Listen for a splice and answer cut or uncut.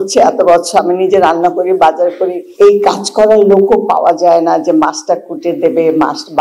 cut